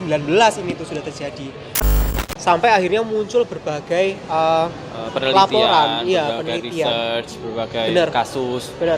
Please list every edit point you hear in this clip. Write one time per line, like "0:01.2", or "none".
0:01.8